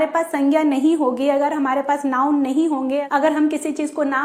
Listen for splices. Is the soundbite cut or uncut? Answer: uncut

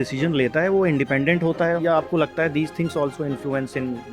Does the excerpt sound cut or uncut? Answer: cut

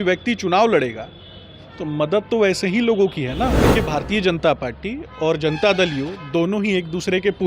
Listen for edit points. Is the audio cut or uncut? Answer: cut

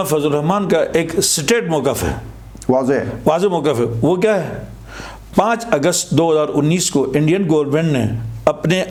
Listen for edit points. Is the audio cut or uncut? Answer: uncut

